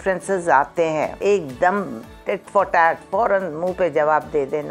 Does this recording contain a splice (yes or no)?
yes